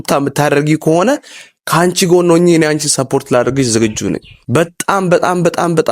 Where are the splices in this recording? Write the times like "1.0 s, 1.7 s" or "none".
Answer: 4.3 s